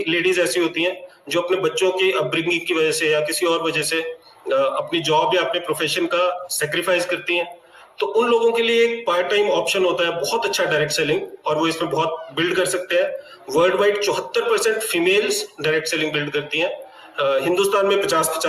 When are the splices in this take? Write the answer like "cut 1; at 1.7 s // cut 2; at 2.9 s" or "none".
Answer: none